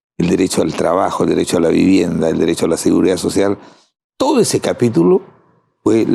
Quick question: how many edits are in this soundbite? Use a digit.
0